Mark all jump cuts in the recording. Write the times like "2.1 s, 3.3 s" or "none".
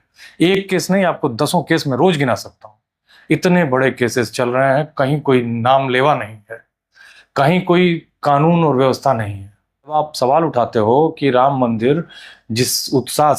9.9 s